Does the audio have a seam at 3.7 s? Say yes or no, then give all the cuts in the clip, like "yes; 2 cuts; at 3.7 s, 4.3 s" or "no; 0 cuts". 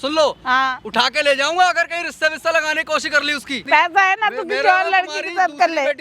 yes; 1 cut; at 3.7 s